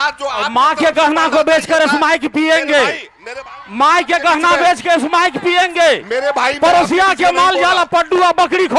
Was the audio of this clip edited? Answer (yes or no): no